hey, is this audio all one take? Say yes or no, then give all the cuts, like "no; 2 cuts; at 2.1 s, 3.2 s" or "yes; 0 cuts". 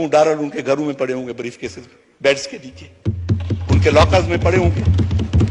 yes; 0 cuts